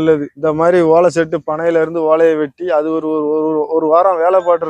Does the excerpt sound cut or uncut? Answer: uncut